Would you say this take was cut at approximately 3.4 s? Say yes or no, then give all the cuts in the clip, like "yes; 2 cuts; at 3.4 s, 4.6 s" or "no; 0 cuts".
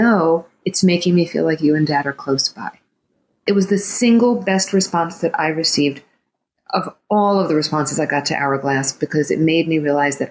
yes; 1 cut; at 3.4 s